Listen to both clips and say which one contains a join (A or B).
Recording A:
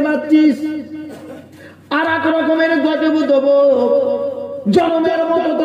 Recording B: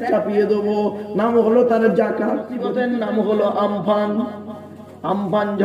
B